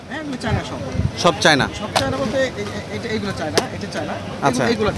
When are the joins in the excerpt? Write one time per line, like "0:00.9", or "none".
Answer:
none